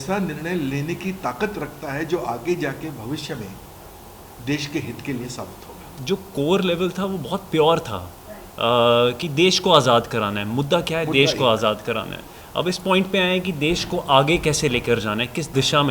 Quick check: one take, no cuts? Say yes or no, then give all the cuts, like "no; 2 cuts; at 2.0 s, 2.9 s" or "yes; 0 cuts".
no; 1 cut; at 5.9 s